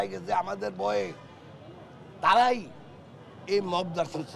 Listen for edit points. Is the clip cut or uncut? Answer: uncut